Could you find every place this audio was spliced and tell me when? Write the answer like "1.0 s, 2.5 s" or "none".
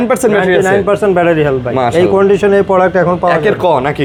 none